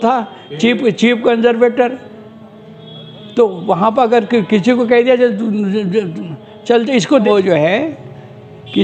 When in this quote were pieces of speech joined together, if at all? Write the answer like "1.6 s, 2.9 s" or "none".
7.2 s

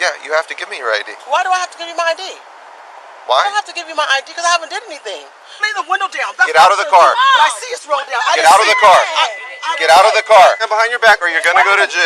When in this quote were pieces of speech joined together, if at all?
5.7 s, 10.6 s

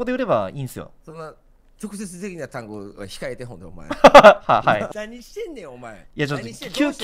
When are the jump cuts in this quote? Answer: 1.0 s, 4.9 s

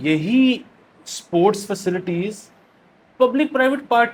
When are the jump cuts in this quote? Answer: none

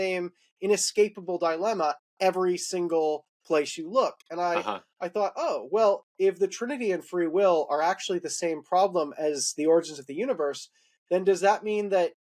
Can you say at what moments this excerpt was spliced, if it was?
none

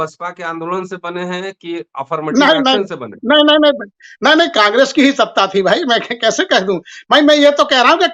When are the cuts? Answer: none

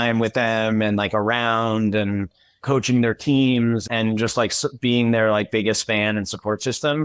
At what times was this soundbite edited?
none

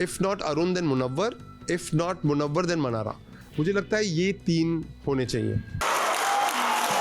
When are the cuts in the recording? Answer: 5.8 s

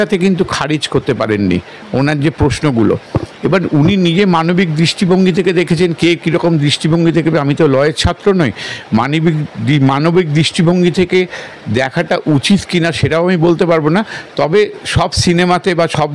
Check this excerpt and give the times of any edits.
none

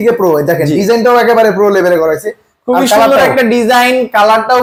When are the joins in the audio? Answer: none

